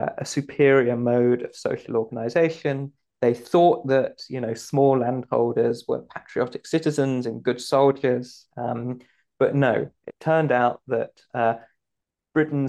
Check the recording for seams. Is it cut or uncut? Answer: uncut